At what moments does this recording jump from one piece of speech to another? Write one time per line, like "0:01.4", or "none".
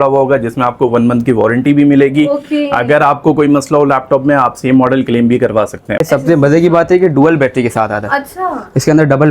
0:06.0